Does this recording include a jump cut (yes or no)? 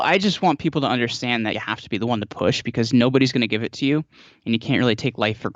yes